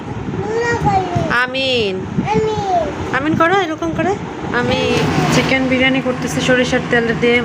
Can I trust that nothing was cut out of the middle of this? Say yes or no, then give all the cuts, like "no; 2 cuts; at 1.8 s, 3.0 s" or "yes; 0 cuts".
no; 1 cut; at 5.0 s